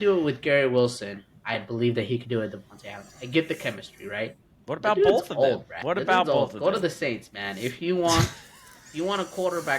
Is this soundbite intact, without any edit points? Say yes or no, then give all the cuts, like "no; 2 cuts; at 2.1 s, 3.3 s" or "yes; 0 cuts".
no; 1 cut; at 5.7 s